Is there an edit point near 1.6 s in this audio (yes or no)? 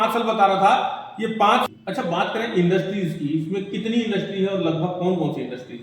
yes